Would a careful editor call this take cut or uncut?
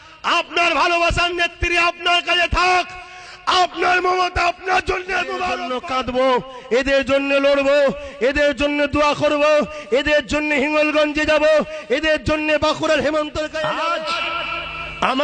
cut